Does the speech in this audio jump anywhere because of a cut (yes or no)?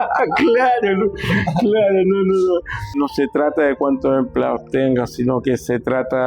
yes